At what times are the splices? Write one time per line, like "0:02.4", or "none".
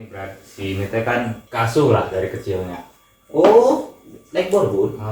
0:01.4